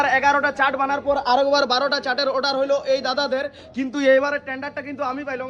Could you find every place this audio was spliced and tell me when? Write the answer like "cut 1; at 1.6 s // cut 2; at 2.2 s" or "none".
none